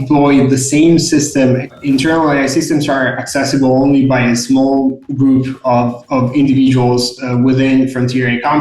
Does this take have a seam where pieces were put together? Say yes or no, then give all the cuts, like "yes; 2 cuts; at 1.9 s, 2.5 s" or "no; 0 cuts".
yes; 1 cut; at 1.7 s